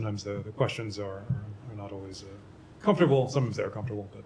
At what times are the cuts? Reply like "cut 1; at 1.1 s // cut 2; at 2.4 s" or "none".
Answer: none